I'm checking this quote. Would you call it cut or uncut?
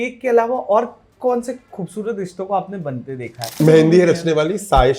cut